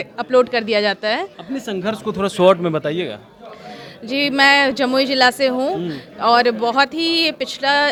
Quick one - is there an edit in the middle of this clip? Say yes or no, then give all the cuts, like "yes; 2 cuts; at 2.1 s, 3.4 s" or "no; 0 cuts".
no; 0 cuts